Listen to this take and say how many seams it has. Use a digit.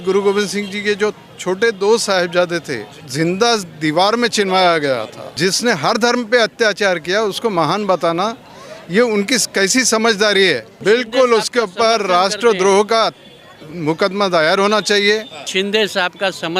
4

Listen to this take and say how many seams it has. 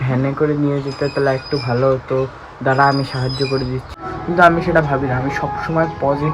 1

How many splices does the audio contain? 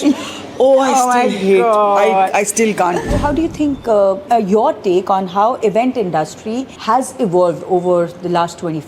3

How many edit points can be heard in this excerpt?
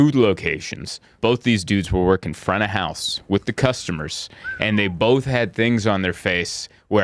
1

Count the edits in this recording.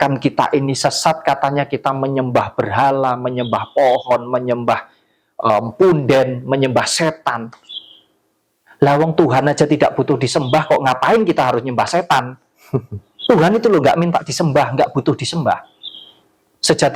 0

